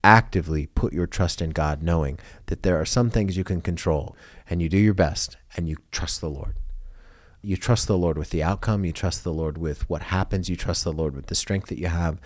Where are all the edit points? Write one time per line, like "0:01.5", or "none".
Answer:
0:04.2
0:07.4